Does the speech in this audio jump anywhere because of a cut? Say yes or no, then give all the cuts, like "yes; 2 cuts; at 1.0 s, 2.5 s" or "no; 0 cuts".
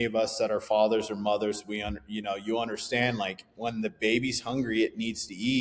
no; 0 cuts